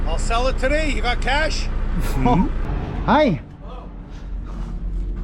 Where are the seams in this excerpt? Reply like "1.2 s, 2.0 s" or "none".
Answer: 2.6 s